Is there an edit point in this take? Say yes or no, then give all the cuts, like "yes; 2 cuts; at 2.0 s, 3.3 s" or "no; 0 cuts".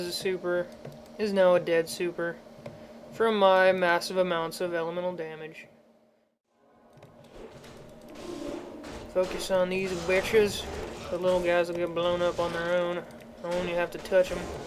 yes; 1 cut; at 12.3 s